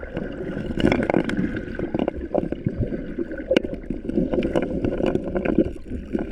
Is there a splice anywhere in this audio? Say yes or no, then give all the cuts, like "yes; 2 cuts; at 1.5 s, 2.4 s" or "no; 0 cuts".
no; 0 cuts